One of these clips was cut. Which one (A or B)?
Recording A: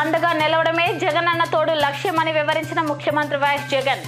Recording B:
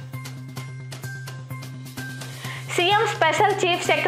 B